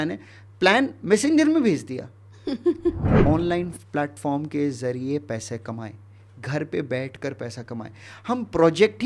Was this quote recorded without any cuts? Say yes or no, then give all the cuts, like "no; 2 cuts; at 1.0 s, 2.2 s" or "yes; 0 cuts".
no; 1 cut; at 3.1 s